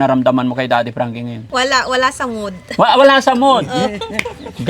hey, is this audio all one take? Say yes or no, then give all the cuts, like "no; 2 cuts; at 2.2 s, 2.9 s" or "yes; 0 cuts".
no; 1 cut; at 1.5 s